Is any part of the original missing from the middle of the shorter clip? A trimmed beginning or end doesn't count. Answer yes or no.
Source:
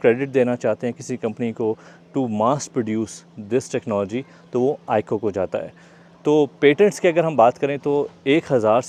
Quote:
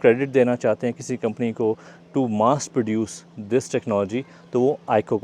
no